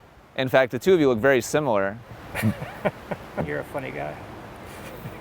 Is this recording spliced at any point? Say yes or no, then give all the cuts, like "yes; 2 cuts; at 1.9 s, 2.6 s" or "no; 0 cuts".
yes; 1 cut; at 3.4 s